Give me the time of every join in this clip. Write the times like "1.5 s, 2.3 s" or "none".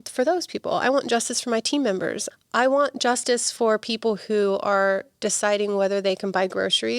2.2 s